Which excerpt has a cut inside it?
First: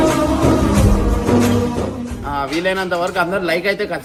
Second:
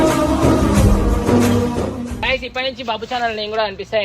second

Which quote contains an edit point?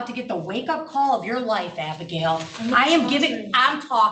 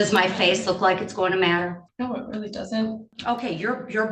second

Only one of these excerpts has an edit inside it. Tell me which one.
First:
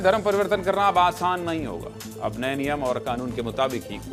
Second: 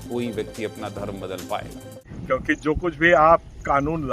second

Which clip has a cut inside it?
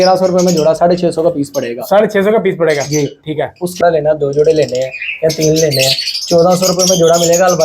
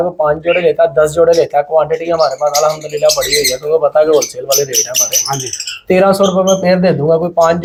first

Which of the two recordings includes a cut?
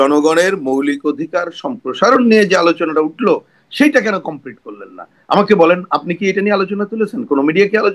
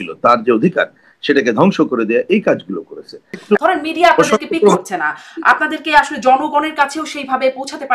second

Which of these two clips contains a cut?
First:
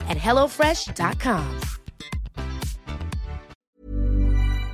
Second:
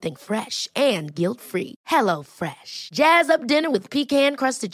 first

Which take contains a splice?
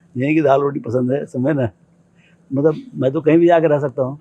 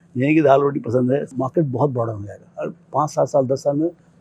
second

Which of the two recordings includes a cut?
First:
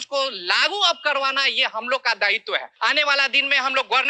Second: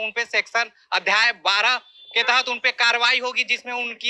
first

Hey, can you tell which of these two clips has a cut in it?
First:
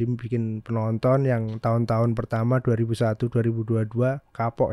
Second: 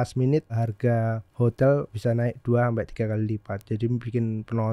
second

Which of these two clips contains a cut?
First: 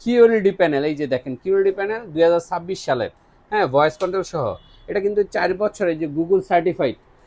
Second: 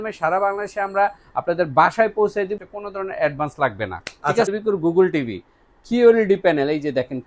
second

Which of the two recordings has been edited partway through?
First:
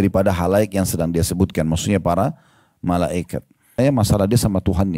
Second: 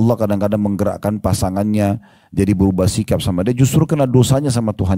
first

